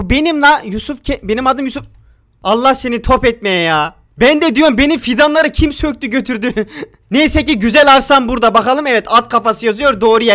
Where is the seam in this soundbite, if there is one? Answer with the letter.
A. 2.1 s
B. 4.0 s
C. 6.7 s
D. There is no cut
D